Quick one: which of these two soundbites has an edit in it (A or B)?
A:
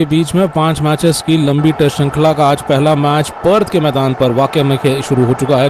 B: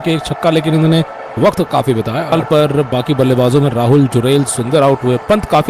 B